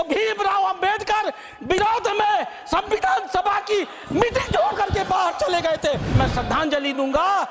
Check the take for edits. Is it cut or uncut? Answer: cut